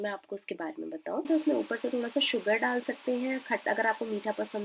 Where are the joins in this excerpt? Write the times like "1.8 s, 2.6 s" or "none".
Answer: 1.3 s